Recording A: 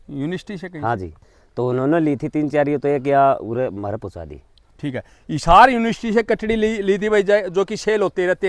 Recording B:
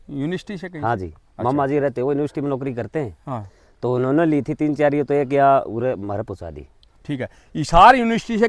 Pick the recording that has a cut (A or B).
A